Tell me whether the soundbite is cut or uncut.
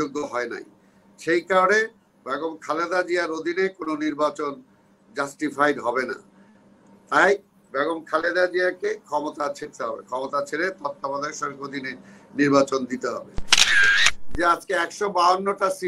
cut